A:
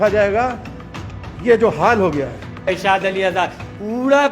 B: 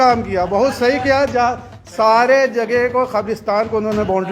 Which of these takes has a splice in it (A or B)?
A